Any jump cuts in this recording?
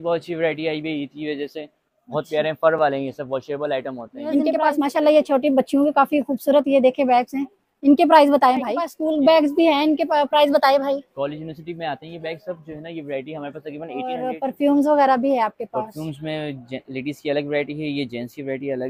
yes; 3 cuts; at 4.5 s, 8.9 s, 14.2 s

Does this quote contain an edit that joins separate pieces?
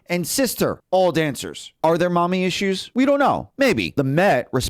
yes; 4 cuts; at 0.8 s, 1.6 s, 2.8 s, 3.6 s

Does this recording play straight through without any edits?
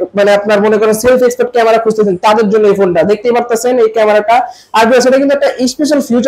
yes; 0 cuts

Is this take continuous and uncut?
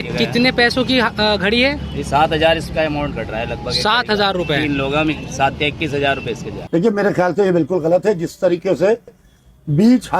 no; 1 cut; at 6.5 s

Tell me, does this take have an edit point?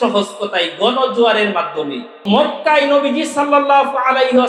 yes; 1 cut; at 2.6 s

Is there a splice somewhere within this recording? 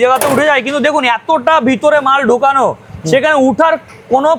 no; 0 cuts

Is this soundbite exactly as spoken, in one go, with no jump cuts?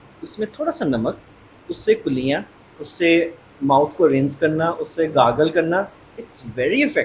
yes; 0 cuts

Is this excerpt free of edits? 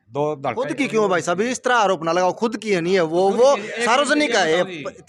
yes; 0 cuts

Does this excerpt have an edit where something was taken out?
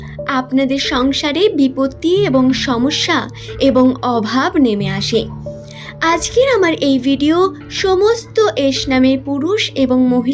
no; 0 cuts

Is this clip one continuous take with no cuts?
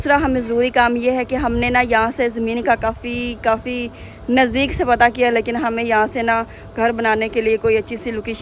yes; 0 cuts

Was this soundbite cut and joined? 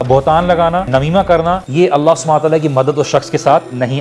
no; 0 cuts

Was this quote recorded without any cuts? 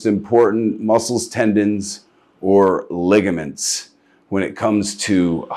yes; 0 cuts

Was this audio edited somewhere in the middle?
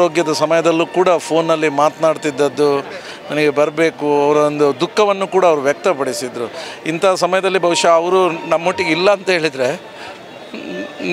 no; 0 cuts

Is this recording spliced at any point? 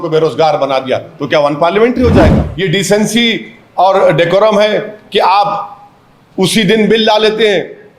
yes; 1 cut; at 2.5 s

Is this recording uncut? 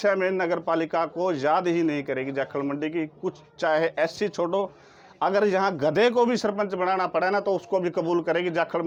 yes; 0 cuts

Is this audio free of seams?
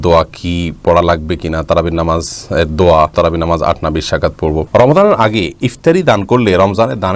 no; 2 cuts; at 3.1 s, 4.6 s

